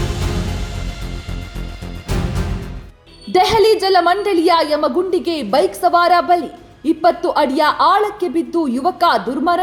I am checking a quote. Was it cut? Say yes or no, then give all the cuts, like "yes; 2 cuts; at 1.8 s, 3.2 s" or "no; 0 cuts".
no; 0 cuts